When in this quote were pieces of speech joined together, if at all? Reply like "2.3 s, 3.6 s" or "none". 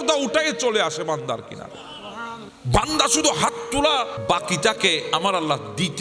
2.5 s, 4.1 s